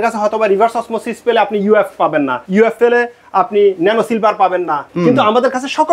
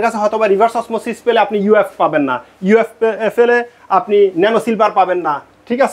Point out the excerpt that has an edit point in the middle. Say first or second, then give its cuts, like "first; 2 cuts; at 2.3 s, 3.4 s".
first; 2 cuts; at 2.6 s, 4.9 s